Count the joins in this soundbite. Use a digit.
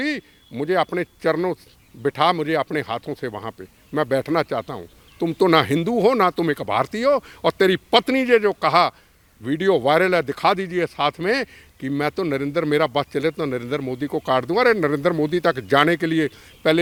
0